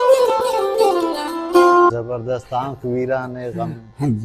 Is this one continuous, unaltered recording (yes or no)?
no